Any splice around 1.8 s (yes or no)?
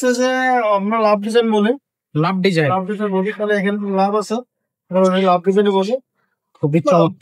no